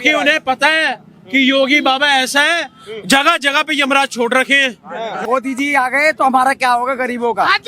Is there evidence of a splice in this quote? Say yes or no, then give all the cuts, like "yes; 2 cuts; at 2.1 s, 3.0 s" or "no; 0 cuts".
yes; 1 cut; at 5.3 s